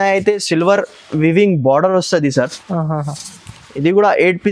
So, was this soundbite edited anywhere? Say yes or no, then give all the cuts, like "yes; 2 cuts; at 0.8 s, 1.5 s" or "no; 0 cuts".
no; 0 cuts